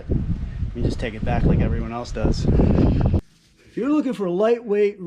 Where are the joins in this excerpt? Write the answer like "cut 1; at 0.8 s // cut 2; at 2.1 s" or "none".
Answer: cut 1; at 3.1 s